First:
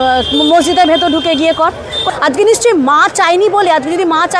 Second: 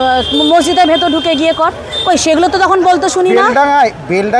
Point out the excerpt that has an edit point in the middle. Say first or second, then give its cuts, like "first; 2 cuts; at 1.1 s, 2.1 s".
first; 1 cut; at 2.0 s